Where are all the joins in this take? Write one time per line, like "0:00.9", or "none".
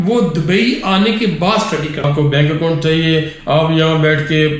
0:02.1

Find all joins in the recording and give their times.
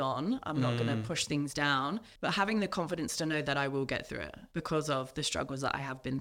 0:02.1
0:04.4

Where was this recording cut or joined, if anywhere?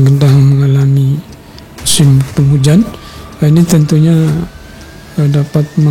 0:02.3

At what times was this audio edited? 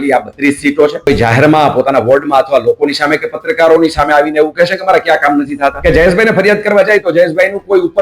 0:01.1
0:05.8

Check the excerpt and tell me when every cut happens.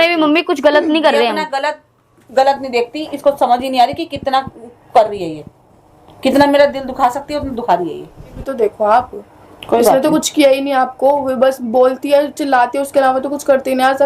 0:08.4

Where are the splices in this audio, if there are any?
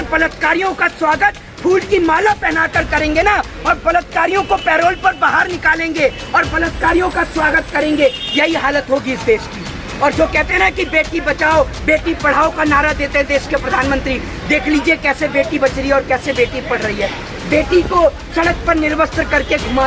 none

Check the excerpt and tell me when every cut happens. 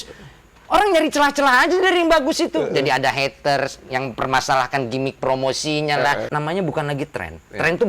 0:06.3

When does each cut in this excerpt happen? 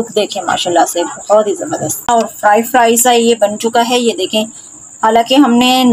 0:02.1

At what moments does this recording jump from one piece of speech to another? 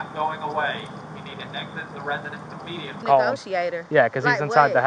0:03.0

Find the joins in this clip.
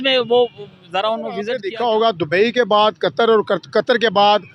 0:01.4

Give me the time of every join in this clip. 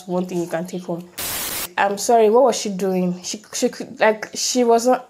0:01.7

